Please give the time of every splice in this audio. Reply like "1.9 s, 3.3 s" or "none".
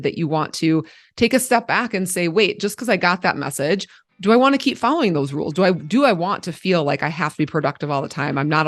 4.0 s